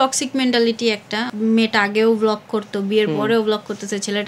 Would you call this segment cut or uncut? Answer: cut